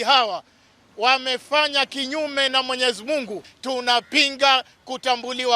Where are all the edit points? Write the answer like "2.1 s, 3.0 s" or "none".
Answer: 3.5 s

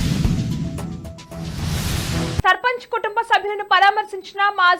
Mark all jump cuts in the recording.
2.4 s

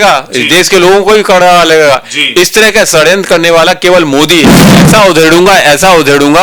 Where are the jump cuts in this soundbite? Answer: 4.8 s

